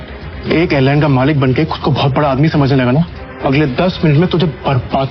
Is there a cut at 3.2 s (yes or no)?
yes